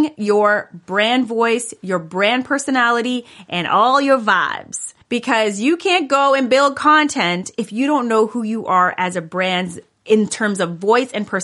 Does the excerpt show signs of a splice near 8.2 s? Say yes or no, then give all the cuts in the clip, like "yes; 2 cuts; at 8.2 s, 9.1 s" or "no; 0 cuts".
no; 0 cuts